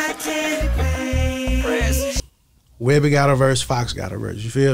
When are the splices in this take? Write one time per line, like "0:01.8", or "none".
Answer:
none

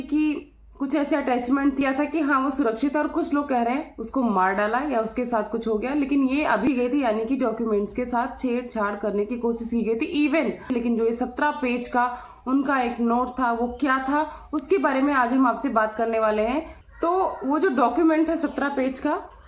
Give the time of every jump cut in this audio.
0:01.8
0:06.7
0:10.7
0:16.8

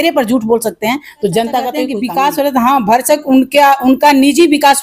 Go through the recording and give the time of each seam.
0:01.9

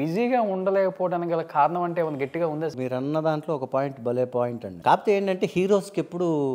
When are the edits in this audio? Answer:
0:02.7
0:04.6

